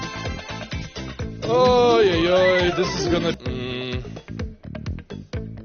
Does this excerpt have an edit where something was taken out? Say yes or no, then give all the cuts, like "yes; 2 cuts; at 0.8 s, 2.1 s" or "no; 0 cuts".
yes; 1 cut; at 3.4 s